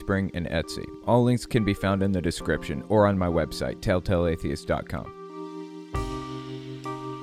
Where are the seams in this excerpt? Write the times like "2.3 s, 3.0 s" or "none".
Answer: 5.2 s